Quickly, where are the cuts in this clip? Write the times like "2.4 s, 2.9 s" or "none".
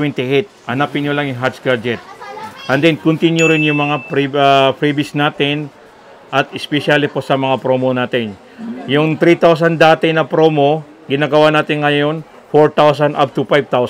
none

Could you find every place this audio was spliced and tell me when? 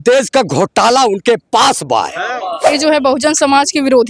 2.7 s

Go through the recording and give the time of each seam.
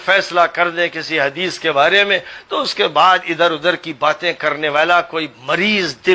none

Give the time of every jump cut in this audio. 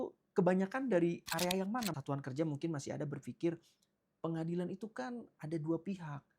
1.9 s

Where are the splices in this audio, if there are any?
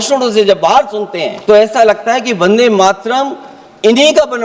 1.3 s

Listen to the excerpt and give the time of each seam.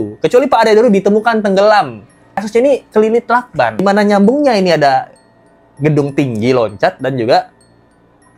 2.4 s, 3.8 s

